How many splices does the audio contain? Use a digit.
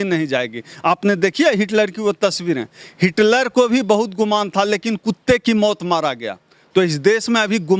0